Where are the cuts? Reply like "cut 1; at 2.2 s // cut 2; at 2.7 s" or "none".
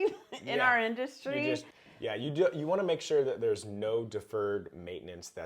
cut 1; at 1.7 s